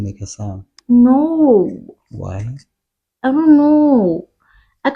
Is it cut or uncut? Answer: uncut